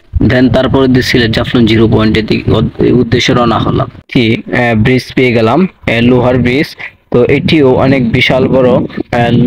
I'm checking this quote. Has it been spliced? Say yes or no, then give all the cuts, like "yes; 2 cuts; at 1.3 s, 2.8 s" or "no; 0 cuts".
yes; 1 cut; at 4.0 s